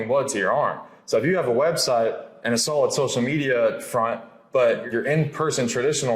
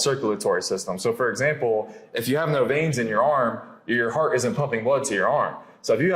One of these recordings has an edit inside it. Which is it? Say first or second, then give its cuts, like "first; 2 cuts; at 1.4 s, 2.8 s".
first; 1 cut; at 4.8 s